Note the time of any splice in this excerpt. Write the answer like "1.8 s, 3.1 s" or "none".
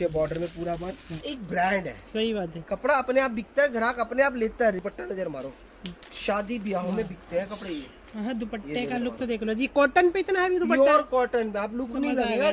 1.2 s, 4.8 s